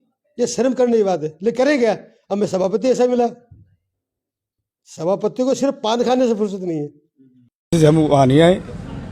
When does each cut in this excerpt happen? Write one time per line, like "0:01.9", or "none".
0:07.7

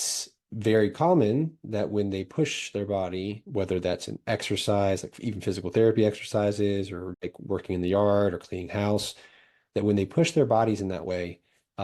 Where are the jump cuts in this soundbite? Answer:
0:07.0

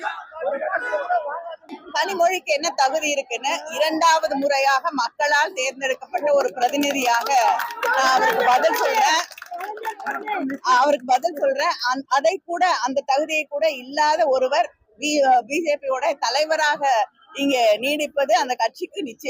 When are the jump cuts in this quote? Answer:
0:01.7

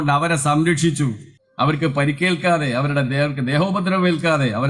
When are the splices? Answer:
none

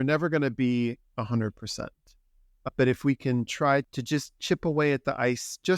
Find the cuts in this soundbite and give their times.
0:03.9

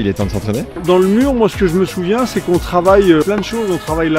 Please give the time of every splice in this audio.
0:00.8
0:03.2

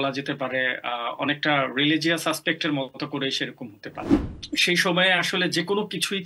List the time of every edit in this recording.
0:04.1

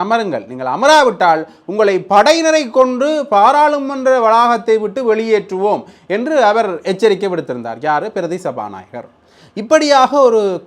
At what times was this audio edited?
none

